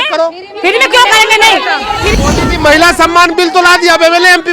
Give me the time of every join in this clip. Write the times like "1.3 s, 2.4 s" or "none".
2.1 s